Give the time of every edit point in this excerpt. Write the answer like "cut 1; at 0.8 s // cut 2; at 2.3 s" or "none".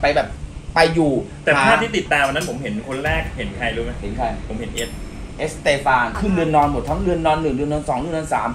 cut 1; at 6.2 s